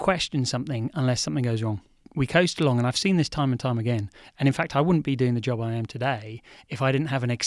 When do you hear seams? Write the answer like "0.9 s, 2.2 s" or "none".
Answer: 2.1 s